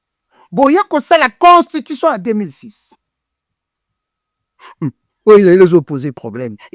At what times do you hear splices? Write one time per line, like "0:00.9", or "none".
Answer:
none